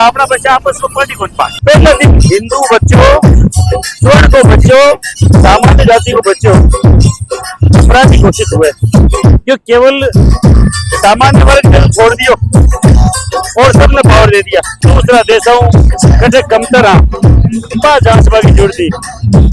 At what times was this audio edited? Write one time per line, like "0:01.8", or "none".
0:01.6
0:14.8